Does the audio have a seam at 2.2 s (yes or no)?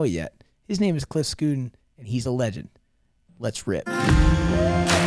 no